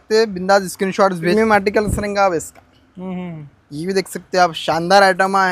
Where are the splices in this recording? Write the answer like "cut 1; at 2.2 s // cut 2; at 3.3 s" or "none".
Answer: cut 1; at 1.3 s